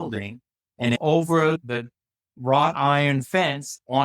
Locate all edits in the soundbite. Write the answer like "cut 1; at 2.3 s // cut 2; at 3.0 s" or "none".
cut 1; at 1.0 s